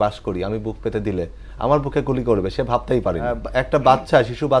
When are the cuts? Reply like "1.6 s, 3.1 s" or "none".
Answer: 3.4 s